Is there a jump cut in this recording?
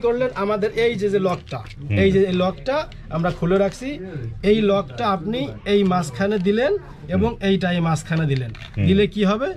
no; 0 cuts

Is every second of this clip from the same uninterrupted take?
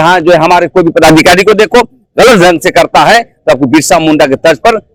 yes; 0 cuts

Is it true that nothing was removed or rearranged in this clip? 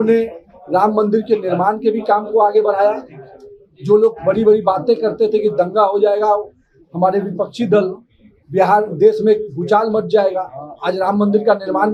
yes; 0 cuts

